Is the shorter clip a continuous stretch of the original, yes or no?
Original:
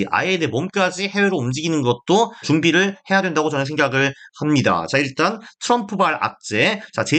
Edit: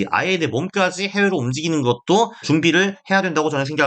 yes